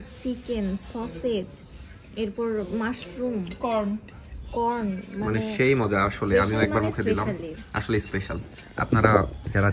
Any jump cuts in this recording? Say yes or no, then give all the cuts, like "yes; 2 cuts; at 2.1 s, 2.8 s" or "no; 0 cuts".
no; 0 cuts